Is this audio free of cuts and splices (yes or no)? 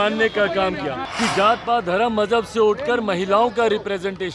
no